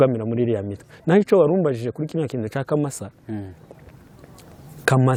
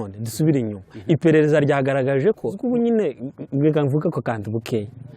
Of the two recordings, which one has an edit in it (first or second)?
second